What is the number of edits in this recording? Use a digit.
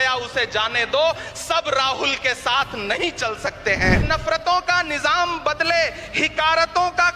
1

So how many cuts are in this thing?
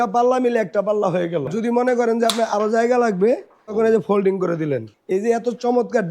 3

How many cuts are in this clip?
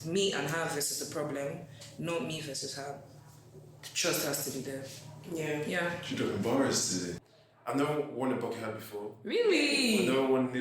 1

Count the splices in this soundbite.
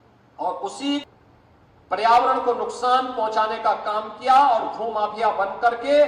1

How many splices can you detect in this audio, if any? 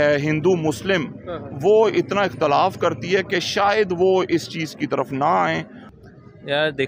1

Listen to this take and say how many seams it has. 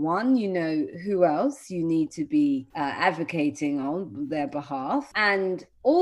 2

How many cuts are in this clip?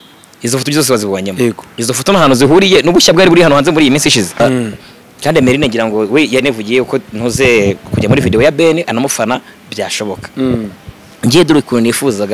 1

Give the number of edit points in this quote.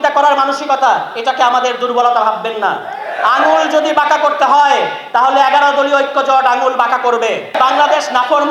1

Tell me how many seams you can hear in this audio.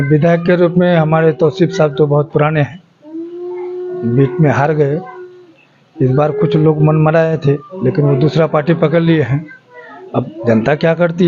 0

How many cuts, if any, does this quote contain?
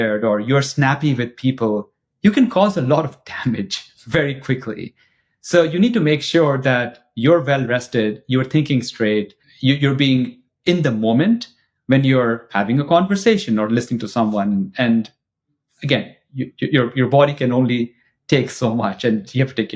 1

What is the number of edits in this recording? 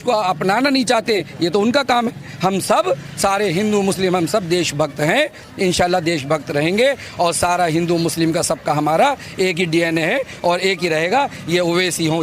1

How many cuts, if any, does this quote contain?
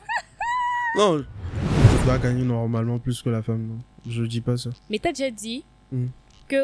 1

